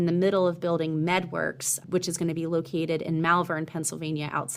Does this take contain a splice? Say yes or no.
no